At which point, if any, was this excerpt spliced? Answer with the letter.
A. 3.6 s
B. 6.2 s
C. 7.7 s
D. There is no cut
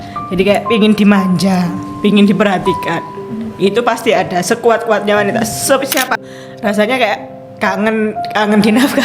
B